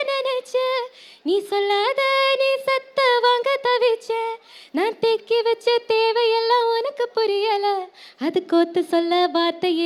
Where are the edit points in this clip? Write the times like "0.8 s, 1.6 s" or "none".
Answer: none